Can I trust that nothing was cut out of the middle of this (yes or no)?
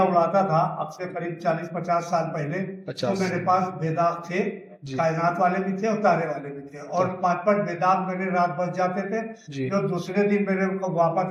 yes